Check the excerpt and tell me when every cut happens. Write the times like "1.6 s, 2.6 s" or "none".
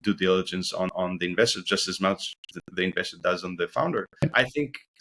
0.9 s, 4.2 s